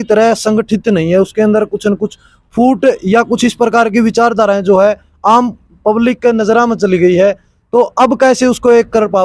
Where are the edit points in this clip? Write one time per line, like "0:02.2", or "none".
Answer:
none